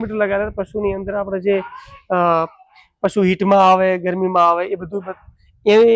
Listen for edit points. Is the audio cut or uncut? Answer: uncut